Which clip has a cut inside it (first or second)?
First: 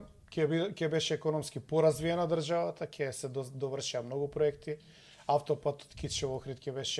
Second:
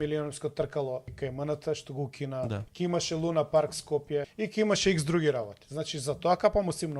second